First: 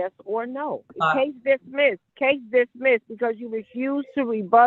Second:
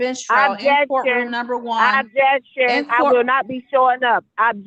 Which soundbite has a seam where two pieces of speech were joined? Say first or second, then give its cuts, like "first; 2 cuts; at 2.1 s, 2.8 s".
first; 2 cuts; at 0.9 s, 2.1 s